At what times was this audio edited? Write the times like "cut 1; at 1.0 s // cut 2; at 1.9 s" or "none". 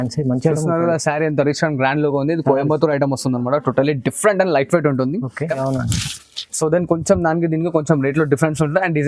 cut 1; at 5.6 s